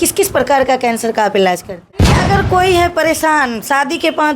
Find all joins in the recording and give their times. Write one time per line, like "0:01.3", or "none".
0:02.2